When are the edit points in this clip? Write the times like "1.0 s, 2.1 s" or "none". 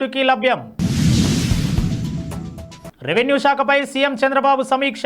none